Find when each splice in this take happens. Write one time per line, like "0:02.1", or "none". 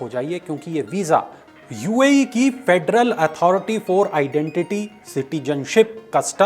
0:01.4